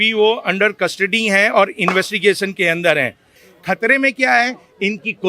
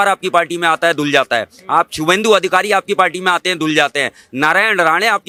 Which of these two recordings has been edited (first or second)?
first